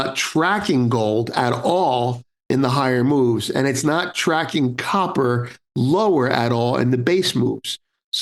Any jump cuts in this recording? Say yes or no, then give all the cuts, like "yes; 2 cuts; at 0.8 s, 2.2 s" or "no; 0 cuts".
no; 0 cuts